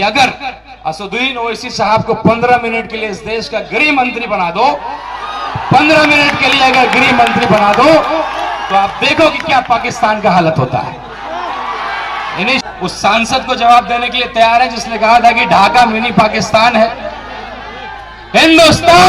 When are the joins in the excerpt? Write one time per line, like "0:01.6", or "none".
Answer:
0:12.6

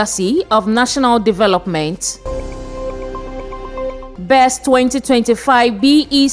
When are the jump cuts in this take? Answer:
0:02.2
0:04.1

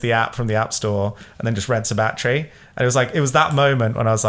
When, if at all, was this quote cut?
none

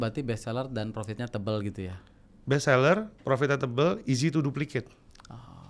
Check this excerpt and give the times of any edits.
none

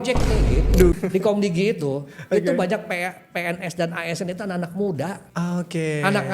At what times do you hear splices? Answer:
0:01.0
0:05.2

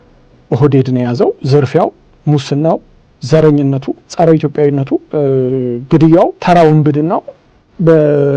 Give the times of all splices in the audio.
0:01.4
0:04.0
0:05.1
0:06.4

